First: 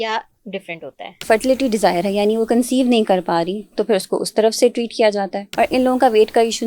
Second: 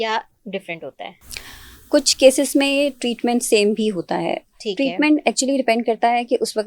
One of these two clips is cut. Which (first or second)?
first